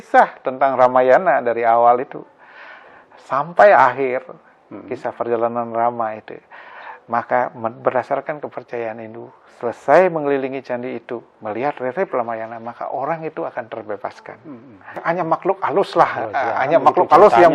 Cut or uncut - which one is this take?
cut